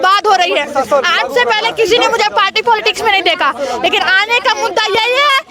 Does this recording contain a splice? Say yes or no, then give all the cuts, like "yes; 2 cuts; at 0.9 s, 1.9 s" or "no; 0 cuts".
no; 0 cuts